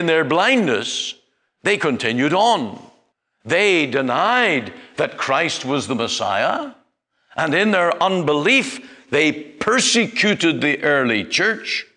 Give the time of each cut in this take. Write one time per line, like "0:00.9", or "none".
none